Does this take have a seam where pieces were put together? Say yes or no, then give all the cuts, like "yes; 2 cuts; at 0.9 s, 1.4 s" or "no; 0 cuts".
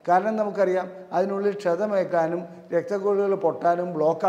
no; 0 cuts